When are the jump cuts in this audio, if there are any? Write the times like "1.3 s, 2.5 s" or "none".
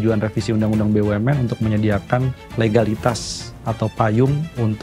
2.4 s